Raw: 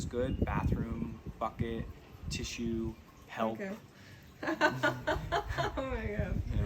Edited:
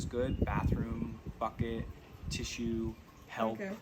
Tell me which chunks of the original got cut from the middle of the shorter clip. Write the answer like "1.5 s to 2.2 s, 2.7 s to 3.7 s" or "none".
none